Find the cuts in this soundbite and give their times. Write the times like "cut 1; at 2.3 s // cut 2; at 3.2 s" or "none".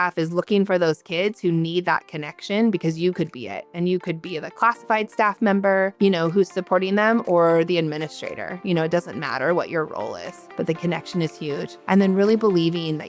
none

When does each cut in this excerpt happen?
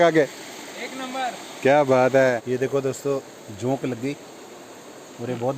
cut 1; at 2.4 s

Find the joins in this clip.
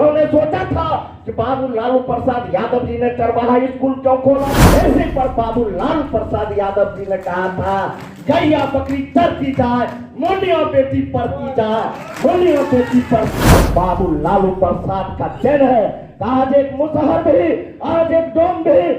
cut 1; at 4.6 s // cut 2; at 13.4 s

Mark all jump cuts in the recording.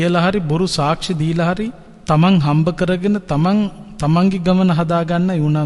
cut 1; at 1.9 s

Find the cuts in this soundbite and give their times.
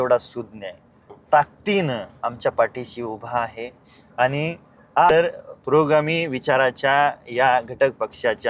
cut 1; at 5.1 s

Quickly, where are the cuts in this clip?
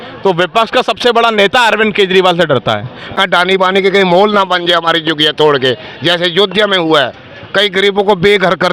cut 1; at 3.1 s

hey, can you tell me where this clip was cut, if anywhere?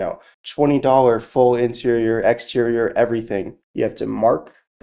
cut 1; at 3.5 s

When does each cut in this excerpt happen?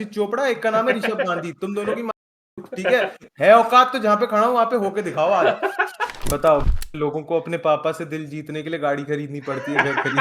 cut 1; at 6.2 s

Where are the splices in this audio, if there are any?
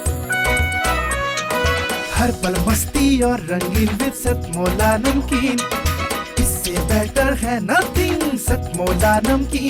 none

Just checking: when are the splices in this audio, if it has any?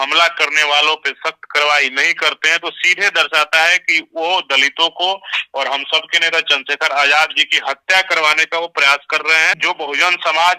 cut 1; at 9.6 s

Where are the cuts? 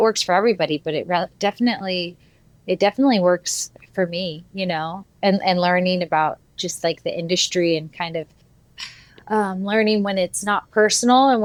none

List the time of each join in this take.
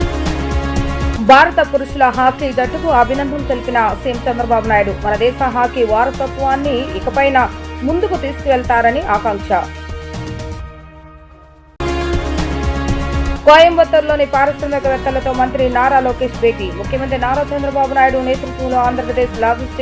cut 1; at 1.0 s

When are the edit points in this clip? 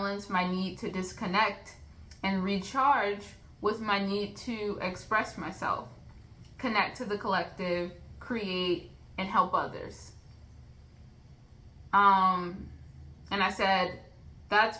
none

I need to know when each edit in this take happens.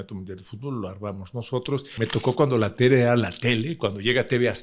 cut 1; at 1.9 s

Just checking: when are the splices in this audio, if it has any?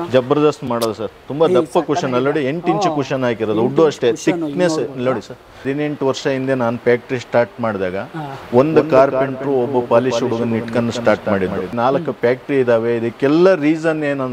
cut 1; at 5.7 s // cut 2; at 11.7 s

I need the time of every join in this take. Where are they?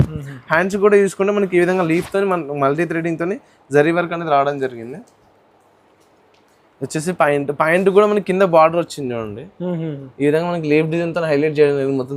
none

